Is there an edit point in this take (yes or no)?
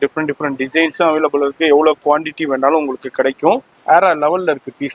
yes